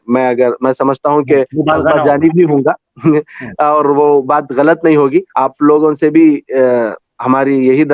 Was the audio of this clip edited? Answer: yes; 1 cut; at 5.3 s

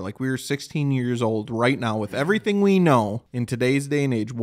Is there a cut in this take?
yes; 1 cut; at 3.3 s

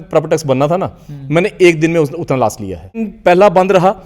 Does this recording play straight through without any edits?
no; 1 cut; at 3.1 s

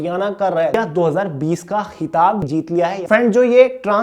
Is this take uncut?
no; 2 cuts; at 0.7 s, 2.5 s

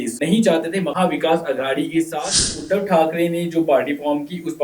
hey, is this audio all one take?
no; 1 cut; at 2.6 s

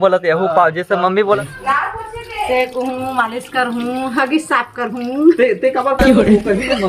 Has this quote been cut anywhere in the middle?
yes; 1 cut; at 1.4 s

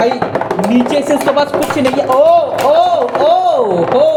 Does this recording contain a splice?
no; 0 cuts

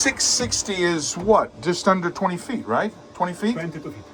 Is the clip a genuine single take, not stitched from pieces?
yes; 0 cuts

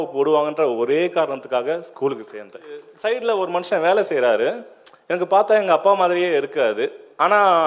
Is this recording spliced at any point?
yes; 1 cut; at 2.9 s

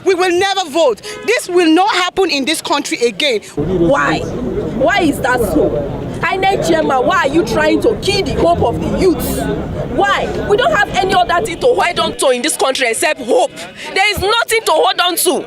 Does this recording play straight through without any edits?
no; 1 cut; at 3.5 s

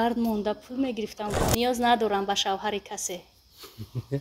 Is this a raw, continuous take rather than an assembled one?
no; 1 cut; at 1.4 s

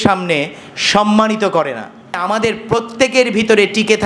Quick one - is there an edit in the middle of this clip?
yes; 1 cut; at 2.2 s

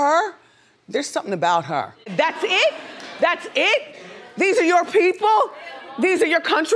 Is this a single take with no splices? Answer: no; 1 cut; at 2.1 s

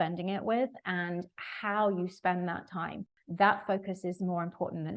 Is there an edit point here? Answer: no; 0 cuts

